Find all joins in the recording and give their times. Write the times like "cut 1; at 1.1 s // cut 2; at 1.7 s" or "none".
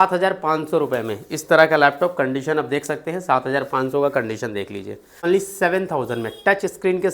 cut 1; at 5.2 s